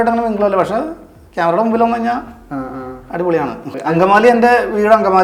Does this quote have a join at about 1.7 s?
no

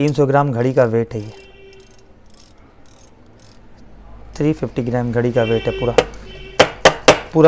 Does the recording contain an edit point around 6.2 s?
no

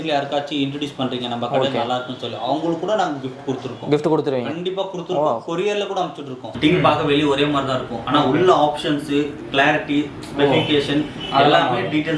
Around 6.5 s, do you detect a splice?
yes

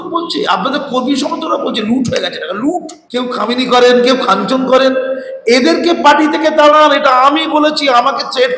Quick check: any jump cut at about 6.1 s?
no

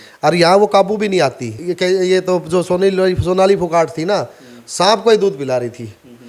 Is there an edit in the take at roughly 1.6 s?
yes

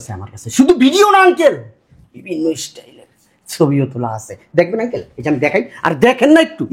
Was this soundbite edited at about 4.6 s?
no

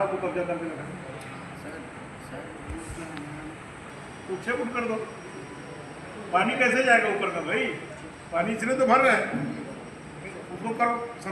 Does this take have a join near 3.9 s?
yes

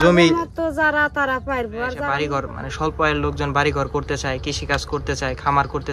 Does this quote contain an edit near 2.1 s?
yes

